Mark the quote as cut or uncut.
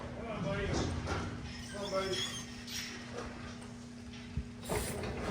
uncut